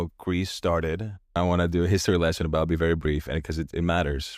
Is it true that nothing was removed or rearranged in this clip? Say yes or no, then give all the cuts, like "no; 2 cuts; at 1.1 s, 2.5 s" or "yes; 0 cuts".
no; 1 cut; at 1.3 s